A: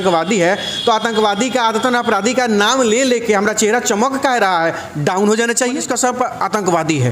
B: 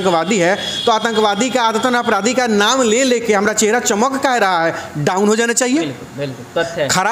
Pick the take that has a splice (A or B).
A